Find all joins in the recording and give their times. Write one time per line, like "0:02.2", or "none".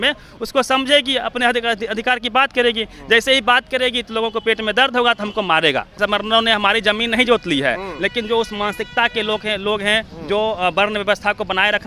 0:06.0